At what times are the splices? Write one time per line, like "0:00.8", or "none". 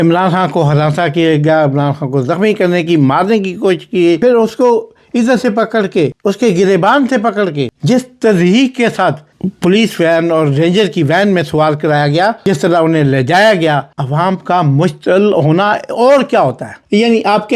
0:12.4